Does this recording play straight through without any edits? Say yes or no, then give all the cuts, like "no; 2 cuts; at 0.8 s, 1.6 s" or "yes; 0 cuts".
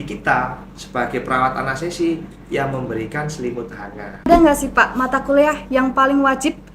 no; 1 cut; at 4.3 s